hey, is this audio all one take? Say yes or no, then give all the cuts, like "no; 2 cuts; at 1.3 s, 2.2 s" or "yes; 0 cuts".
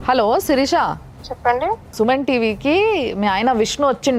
yes; 0 cuts